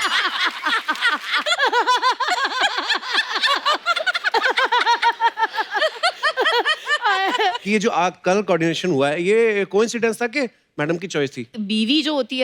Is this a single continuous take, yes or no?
no